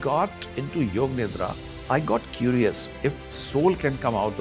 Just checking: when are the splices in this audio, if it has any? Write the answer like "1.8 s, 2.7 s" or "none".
none